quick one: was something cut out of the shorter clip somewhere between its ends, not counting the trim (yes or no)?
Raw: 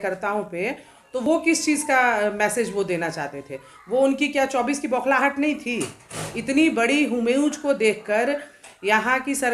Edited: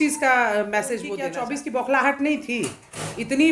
yes